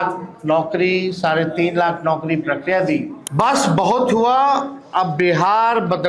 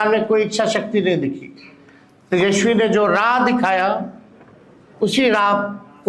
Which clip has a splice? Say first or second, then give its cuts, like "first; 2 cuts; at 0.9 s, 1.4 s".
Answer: first; 1 cut; at 3.2 s